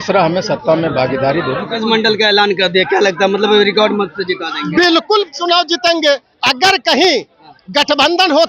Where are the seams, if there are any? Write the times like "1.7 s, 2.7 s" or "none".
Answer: 1.7 s